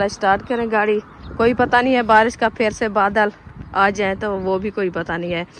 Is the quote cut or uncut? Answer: cut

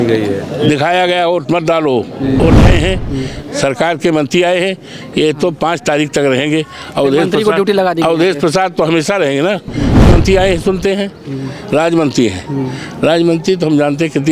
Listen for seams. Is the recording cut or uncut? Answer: cut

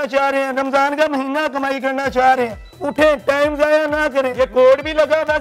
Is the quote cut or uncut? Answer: cut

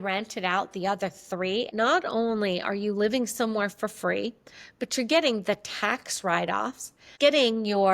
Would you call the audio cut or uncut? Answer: cut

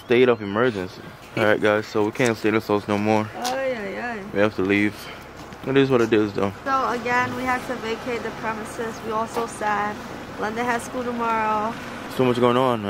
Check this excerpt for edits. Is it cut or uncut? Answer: cut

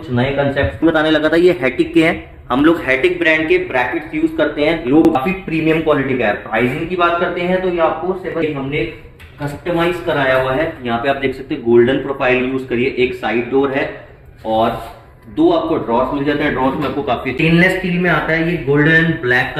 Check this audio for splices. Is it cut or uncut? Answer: cut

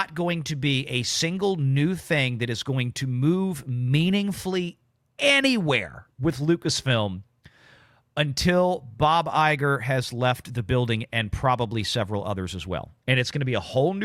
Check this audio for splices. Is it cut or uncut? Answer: uncut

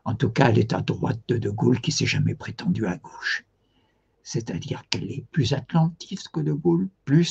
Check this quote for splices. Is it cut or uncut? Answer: cut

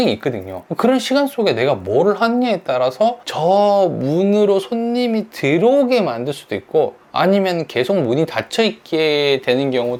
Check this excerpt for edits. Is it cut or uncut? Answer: uncut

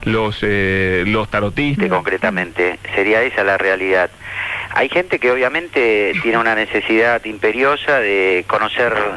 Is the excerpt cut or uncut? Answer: uncut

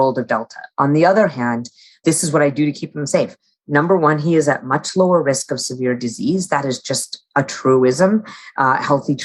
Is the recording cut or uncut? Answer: cut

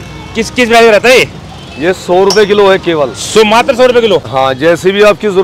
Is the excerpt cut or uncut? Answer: cut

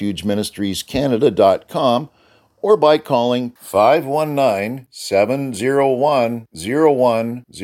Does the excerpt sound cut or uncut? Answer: uncut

